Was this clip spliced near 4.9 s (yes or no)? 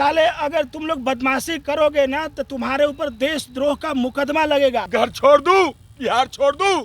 yes